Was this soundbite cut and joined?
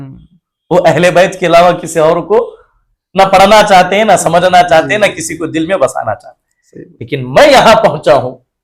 no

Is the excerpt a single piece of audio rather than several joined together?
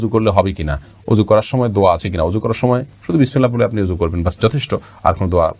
yes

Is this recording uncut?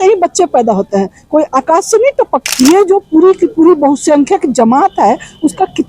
no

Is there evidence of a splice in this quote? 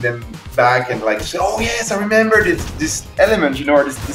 no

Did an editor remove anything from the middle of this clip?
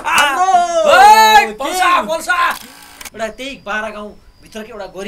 yes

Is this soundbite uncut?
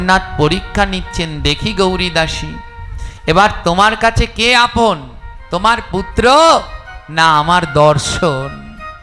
yes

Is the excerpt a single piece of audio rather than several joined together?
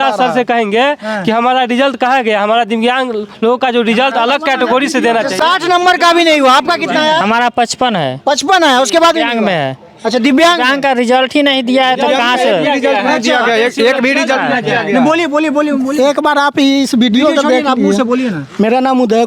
yes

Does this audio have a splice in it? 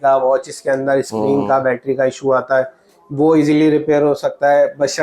no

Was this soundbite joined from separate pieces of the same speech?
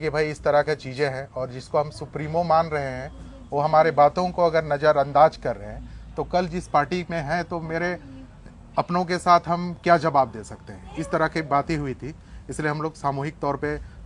no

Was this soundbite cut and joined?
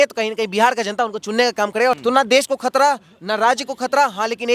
yes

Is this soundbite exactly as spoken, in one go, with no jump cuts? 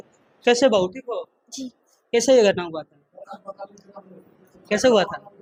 yes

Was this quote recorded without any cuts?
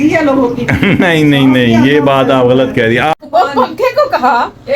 no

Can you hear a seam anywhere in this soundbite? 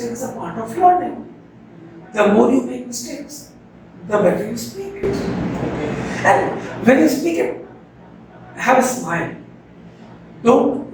no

